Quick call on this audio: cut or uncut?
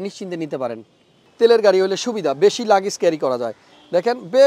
cut